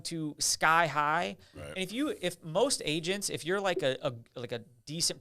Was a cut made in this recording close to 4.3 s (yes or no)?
no